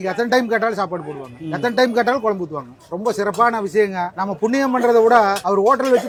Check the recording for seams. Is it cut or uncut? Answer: uncut